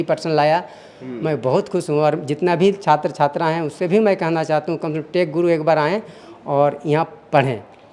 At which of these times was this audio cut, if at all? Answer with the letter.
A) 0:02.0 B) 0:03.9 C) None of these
C